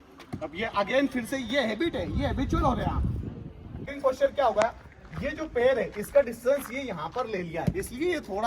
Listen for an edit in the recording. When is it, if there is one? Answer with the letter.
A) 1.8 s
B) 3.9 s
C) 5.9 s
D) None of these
B